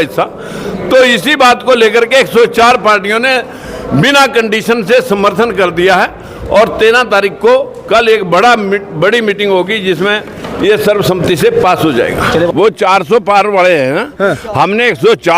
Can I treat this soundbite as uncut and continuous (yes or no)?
no